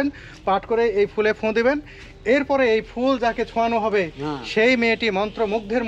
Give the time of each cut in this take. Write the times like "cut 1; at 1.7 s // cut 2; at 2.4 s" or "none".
none